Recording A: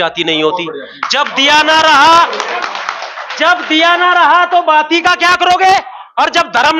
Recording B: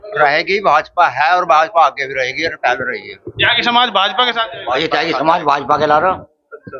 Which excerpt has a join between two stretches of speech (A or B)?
B